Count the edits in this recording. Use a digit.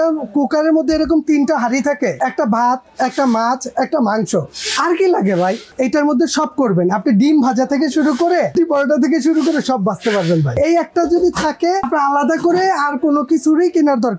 5